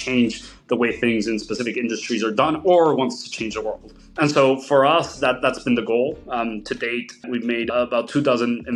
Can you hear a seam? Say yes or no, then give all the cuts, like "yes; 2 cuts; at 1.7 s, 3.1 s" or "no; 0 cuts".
no; 0 cuts